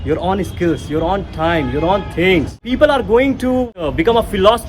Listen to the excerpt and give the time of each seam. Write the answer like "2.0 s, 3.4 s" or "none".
2.6 s, 3.9 s